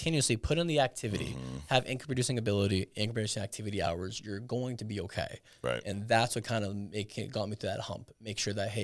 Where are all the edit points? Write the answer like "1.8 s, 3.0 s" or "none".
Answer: none